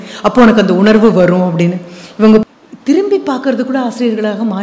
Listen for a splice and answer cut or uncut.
cut